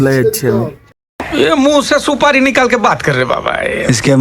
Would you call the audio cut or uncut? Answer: cut